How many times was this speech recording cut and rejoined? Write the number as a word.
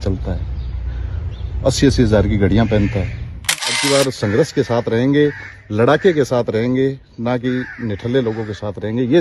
one